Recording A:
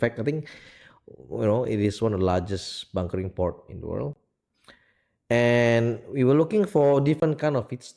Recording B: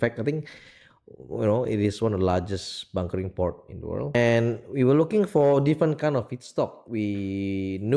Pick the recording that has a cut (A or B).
B